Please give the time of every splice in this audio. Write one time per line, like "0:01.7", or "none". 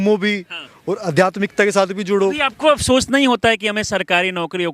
0:02.4